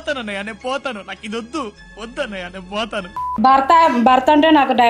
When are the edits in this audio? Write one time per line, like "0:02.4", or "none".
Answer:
none